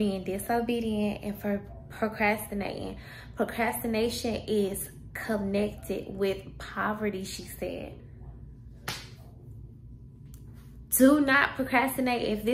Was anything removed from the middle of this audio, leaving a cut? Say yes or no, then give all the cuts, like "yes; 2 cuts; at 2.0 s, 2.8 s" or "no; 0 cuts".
no; 0 cuts